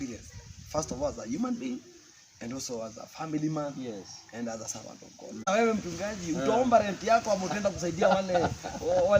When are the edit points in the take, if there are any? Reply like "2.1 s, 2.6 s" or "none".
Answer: 5.5 s